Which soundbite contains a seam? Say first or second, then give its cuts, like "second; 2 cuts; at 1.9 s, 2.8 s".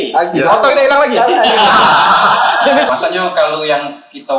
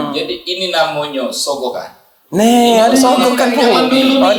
first; 1 cut; at 2.9 s